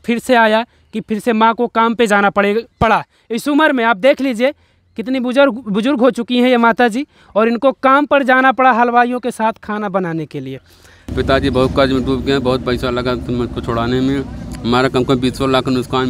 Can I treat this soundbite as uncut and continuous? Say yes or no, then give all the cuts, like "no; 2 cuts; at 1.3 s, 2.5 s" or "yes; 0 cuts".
no; 1 cut; at 11.1 s